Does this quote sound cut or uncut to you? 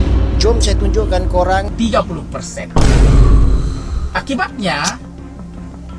cut